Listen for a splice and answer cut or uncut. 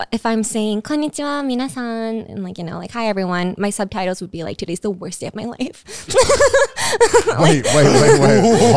uncut